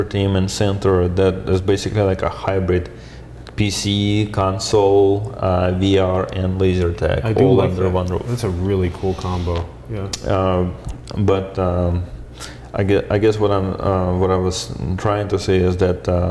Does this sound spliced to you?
no; 0 cuts

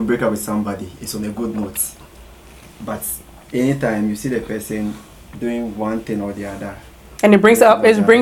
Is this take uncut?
yes; 0 cuts

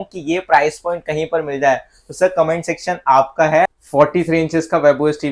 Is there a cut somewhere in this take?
yes; 1 cut; at 3.8 s

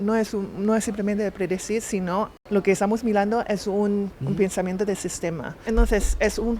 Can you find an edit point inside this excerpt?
yes; 3 cuts; at 2.3 s, 4.1 s, 5.5 s

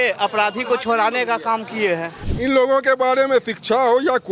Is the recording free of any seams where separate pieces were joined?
no; 1 cut; at 2.2 s

